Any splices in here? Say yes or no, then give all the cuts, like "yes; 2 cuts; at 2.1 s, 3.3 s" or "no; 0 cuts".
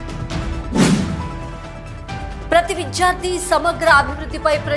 no; 0 cuts